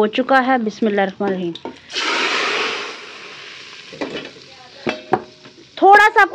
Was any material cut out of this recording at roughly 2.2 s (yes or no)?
no